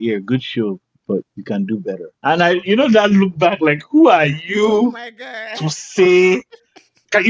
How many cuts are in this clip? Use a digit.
2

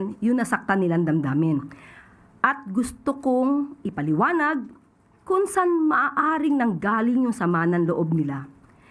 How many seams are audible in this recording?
0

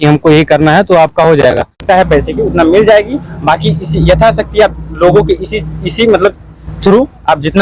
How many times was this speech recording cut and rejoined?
1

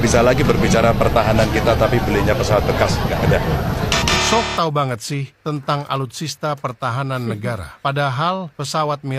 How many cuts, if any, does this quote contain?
0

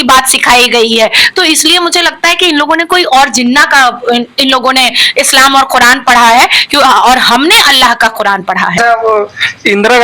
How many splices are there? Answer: 1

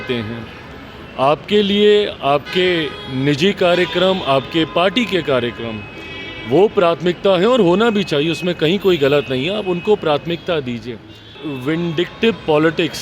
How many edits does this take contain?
1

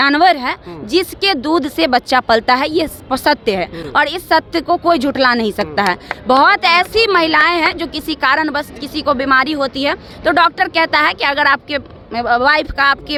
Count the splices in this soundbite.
0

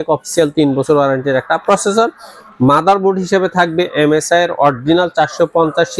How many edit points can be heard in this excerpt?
0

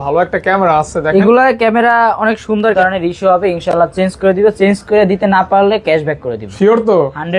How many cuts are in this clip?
1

